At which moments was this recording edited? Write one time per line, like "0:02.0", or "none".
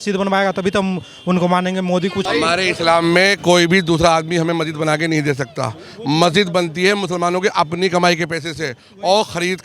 0:02.2